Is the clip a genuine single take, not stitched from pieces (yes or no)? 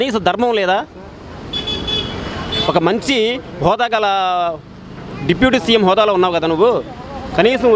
yes